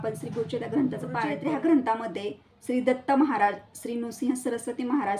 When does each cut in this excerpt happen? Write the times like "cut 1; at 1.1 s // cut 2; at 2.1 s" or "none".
cut 1; at 1.3 s